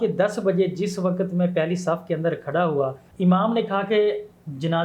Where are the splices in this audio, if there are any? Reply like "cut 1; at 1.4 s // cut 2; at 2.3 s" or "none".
none